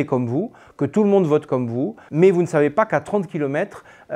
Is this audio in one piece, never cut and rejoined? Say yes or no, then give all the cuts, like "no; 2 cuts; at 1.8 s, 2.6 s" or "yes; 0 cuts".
no; 1 cut; at 2.0 s